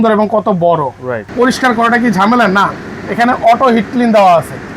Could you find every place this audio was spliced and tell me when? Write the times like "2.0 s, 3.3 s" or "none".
1.2 s